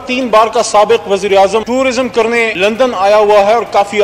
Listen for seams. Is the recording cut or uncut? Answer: uncut